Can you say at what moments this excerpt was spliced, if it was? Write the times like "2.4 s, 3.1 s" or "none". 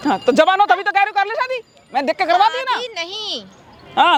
none